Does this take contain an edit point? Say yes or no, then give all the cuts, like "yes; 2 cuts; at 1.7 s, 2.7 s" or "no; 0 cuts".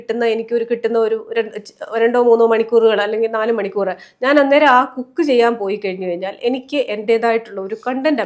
no; 0 cuts